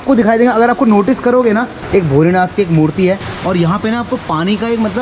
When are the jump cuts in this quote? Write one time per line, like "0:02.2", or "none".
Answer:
0:01.8
0:03.2